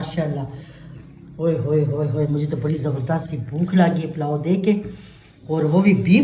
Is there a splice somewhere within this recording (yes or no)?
no